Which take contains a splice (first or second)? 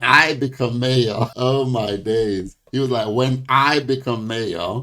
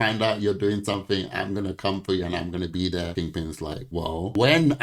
first